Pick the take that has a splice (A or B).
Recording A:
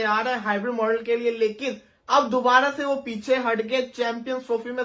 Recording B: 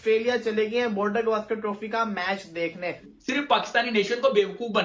B